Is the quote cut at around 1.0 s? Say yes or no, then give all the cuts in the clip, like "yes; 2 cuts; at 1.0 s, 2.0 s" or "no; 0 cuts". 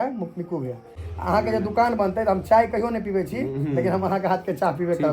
yes; 1 cut; at 1.0 s